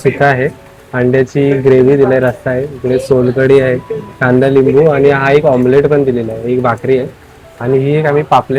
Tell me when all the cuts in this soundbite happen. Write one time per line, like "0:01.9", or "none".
none